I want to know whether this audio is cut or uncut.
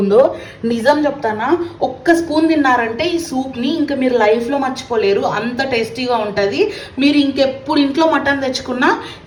uncut